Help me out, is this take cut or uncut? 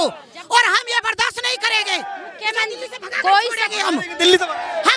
uncut